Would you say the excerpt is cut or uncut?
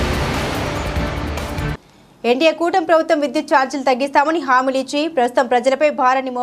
cut